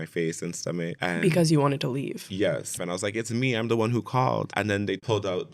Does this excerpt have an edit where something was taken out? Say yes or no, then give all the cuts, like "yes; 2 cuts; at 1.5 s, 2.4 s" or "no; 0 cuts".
yes; 3 cuts; at 1.0 s, 2.7 s, 4.5 s